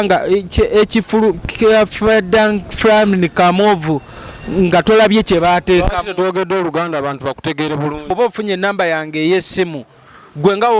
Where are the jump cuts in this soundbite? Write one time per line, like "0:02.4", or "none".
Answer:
0:08.1